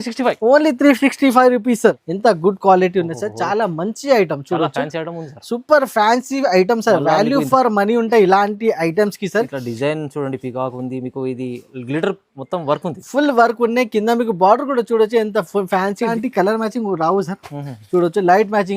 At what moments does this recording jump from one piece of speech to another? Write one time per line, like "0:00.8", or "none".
0:02.1
0:16.1